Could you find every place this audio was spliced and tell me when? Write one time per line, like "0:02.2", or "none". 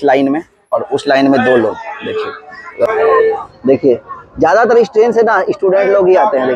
0:02.9